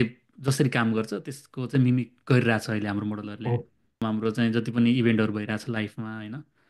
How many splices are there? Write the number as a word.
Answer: one